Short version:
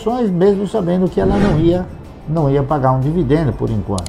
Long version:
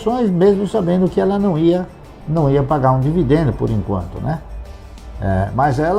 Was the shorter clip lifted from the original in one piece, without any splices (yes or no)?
yes